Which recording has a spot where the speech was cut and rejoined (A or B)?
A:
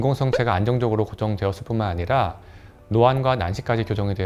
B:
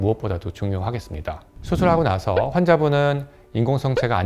B